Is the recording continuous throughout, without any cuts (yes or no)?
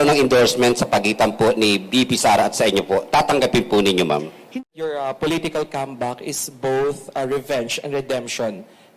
no